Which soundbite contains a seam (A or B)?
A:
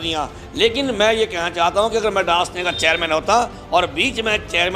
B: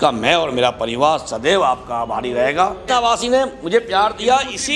B